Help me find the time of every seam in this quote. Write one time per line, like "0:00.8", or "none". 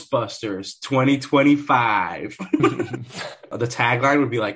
0:03.5